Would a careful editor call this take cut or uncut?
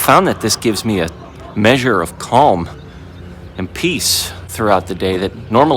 uncut